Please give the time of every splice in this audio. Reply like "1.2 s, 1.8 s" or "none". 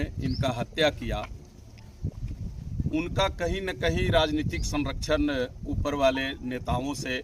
none